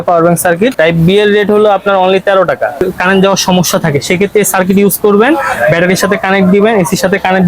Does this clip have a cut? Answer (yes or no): yes